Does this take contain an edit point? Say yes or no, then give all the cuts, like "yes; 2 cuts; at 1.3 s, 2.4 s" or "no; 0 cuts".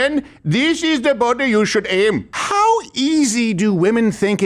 yes; 1 cut; at 2.4 s